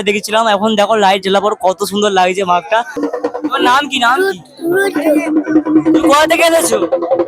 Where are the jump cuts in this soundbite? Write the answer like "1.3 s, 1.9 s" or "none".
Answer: 3.0 s